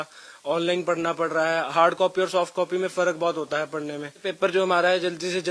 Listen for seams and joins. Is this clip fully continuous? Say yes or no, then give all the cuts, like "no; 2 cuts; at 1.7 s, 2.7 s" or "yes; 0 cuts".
yes; 0 cuts